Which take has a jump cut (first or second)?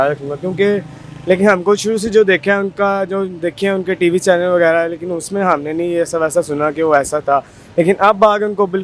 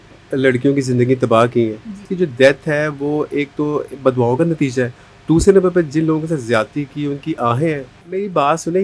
second